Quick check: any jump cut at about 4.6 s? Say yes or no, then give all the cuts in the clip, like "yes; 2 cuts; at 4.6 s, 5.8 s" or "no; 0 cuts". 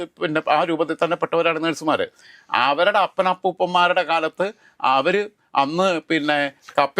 no; 0 cuts